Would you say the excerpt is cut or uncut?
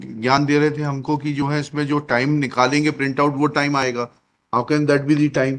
uncut